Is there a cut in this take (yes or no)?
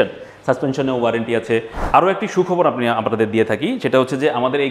yes